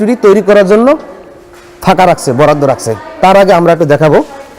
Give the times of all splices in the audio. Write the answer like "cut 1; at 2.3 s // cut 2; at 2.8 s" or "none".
none